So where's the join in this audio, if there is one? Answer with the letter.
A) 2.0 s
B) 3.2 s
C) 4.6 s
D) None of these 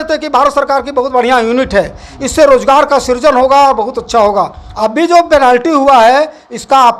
C